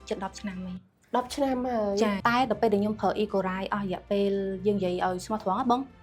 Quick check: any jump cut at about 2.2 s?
yes; 1 cut; at 2.2 s

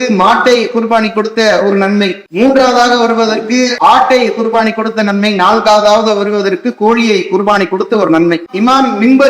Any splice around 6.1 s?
no; 3 cuts; at 2.2 s, 3.7 s, 8.5 s

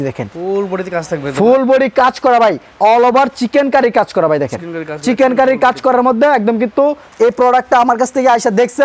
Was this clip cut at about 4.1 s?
no; 2 cuts; at 2.7 s, 7.1 s

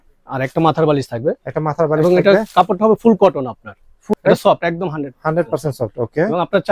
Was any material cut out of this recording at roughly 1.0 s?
no; 1 cut; at 4.0 s

